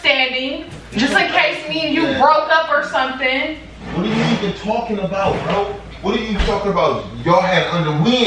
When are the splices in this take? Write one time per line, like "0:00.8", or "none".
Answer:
none